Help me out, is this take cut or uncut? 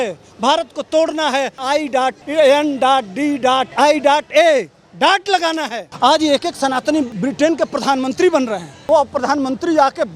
cut